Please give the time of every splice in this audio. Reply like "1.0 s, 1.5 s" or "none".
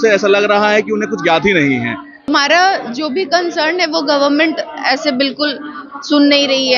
2.3 s